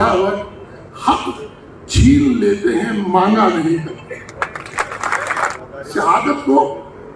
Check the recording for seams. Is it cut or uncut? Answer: cut